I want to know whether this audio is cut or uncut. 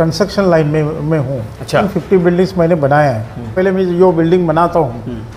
cut